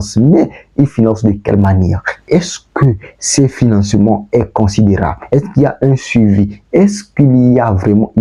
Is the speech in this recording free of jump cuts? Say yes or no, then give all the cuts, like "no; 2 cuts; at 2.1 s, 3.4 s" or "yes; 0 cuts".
yes; 0 cuts